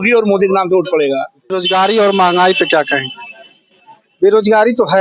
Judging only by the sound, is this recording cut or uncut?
cut